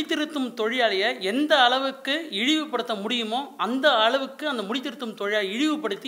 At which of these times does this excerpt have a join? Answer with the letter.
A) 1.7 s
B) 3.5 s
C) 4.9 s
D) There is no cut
D